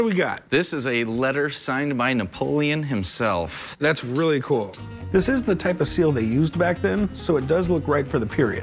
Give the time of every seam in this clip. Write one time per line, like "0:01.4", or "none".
none